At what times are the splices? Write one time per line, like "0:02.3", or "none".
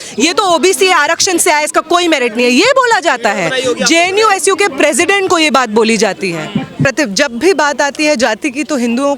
0:06.9

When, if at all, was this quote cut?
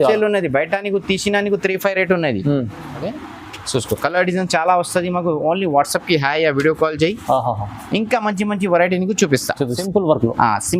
0:03.1
0:09.8

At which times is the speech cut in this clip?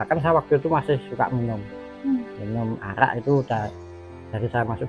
none

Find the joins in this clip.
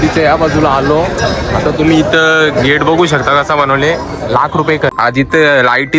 0:05.0

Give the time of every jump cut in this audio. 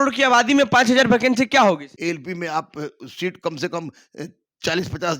0:01.9

